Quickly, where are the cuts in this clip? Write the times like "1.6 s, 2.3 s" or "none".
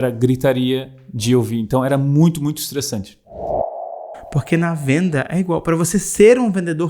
3.7 s